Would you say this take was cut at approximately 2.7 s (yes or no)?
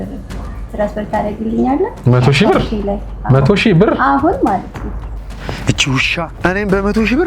no